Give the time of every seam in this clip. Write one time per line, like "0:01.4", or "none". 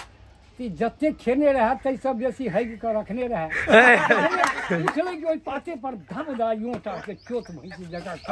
none